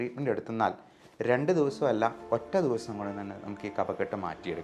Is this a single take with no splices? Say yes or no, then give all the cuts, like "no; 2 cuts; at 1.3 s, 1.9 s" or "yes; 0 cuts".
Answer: yes; 0 cuts